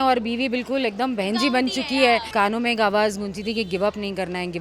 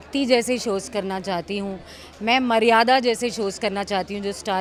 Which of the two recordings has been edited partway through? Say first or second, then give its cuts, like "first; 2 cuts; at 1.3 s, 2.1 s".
first; 1 cut; at 2.3 s